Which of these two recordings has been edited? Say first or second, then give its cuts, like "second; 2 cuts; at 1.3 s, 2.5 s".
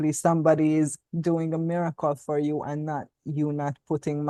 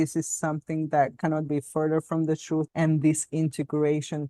second; 1 cut; at 2.7 s